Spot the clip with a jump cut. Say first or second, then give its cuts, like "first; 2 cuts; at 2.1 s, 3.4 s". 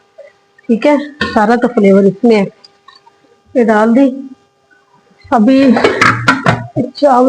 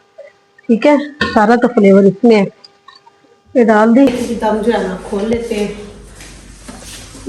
second; 1 cut; at 4.1 s